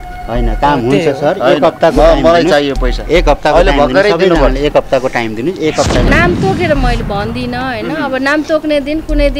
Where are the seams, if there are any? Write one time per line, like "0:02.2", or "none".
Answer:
0:06.1